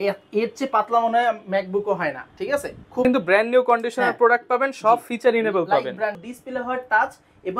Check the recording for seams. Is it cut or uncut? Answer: cut